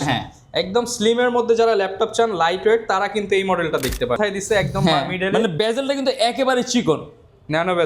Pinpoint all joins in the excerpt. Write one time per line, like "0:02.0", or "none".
0:04.2